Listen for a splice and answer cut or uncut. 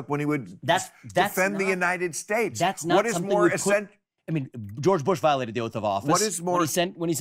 uncut